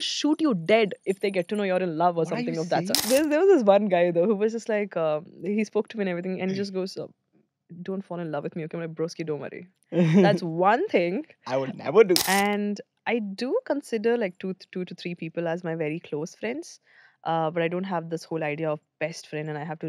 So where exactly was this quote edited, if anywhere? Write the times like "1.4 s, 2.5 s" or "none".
3.1 s, 12.2 s